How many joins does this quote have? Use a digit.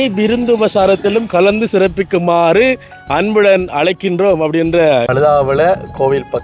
1